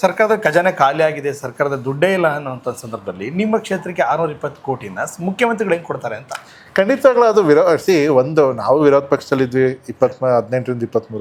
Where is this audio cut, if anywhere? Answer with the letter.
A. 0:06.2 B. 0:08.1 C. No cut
C